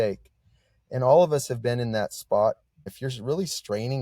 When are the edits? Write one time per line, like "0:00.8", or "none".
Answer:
0:02.9